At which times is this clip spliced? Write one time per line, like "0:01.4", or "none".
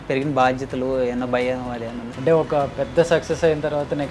0:02.0